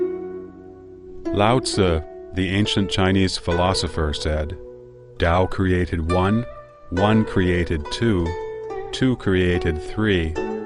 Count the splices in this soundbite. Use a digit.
0